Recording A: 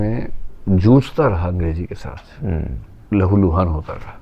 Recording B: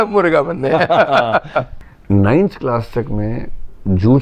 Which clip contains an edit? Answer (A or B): B